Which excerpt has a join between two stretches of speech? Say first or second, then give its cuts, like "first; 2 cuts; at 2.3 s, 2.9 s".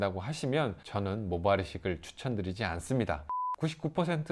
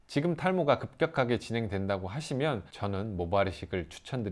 first; 1 cut; at 3.3 s